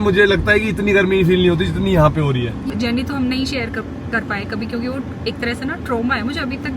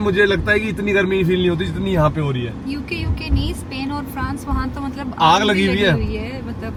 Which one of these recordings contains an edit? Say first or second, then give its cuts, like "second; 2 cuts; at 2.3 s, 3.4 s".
first; 1 cut; at 2.7 s